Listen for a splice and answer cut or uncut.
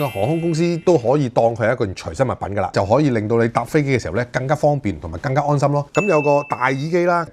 cut